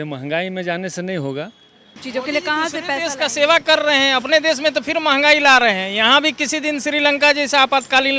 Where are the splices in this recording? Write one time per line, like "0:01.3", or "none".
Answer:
0:02.0

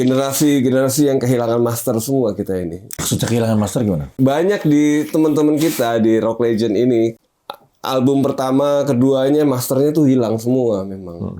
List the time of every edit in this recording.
0:02.9
0:04.1
0:07.2

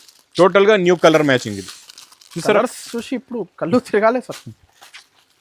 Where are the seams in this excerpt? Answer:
none

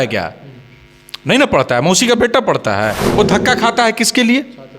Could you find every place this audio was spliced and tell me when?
0:03.0

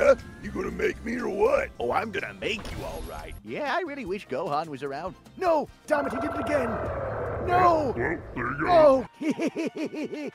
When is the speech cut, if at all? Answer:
0:03.3
0:09.1

